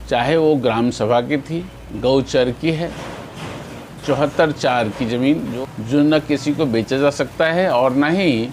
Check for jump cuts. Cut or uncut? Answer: cut